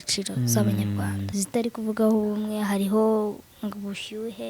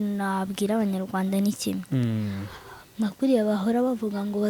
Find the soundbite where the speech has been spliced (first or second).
first